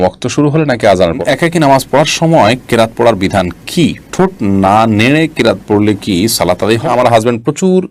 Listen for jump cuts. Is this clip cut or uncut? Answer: cut